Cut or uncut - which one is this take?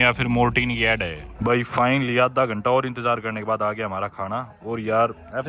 uncut